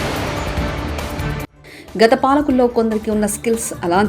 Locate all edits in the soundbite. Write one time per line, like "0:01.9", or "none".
0:01.6